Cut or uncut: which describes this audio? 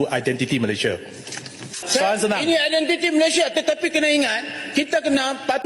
cut